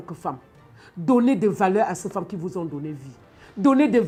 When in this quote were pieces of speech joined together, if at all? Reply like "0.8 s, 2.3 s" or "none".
none

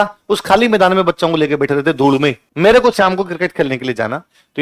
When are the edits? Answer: 2.5 s

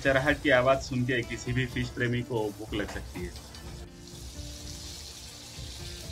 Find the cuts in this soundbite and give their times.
none

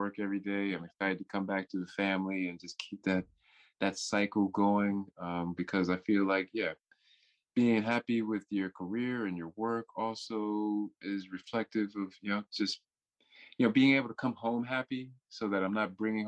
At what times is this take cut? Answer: none

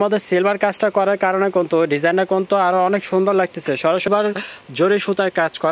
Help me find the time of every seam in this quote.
4.1 s

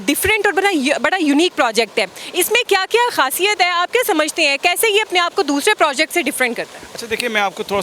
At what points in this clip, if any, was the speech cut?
none

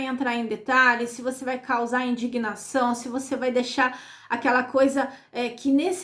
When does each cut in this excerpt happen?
none

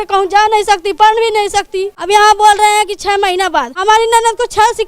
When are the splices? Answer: 1.9 s, 3.7 s

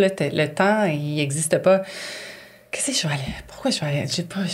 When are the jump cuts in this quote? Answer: none

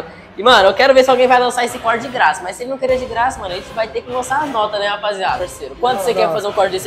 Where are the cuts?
5.4 s

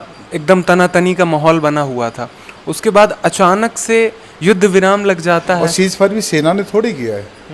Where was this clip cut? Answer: 5.7 s

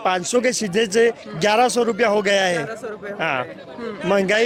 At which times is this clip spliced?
none

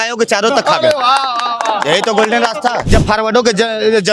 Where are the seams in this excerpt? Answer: 2.8 s

